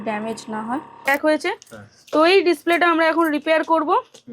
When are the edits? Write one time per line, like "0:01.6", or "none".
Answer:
0:01.1